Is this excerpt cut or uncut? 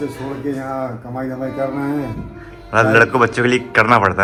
uncut